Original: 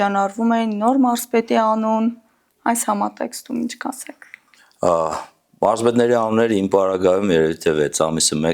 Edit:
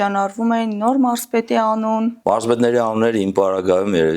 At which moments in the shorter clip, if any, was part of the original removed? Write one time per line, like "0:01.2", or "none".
0:02.2